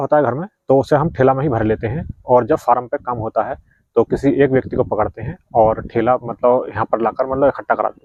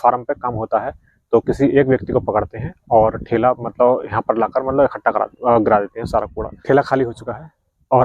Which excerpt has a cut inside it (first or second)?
second